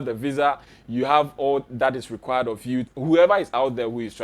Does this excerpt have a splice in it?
yes; 1 cut; at 2.9 s

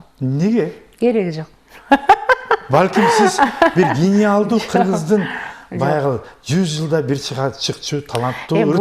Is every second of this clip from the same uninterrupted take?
yes; 0 cuts

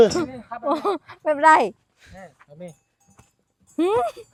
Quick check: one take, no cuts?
yes; 0 cuts

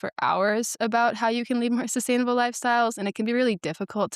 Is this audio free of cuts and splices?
yes; 0 cuts

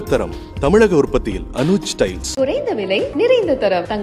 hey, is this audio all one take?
yes; 0 cuts

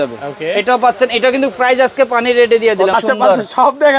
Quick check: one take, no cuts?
no; 1 cut; at 2.9 s

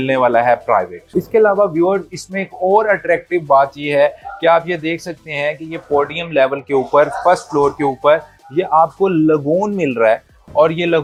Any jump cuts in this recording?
no; 0 cuts

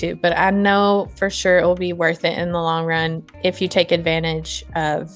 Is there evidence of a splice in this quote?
no; 0 cuts

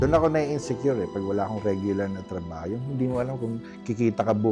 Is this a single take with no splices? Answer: yes; 0 cuts

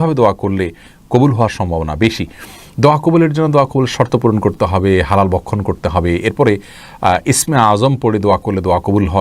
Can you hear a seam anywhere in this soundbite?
no; 0 cuts

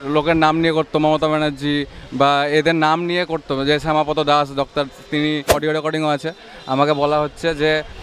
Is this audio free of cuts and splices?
no; 1 cut; at 5.6 s

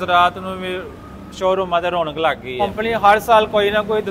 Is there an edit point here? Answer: yes; 1 cut; at 2.6 s

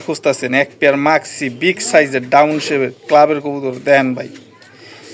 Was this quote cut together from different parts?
no; 0 cuts

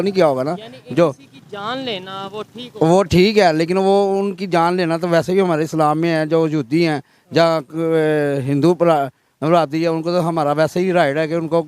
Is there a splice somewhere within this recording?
yes; 1 cut; at 4.3 s

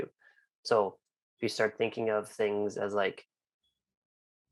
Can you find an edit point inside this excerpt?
no; 0 cuts

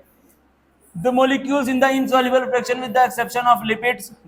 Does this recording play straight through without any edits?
yes; 0 cuts

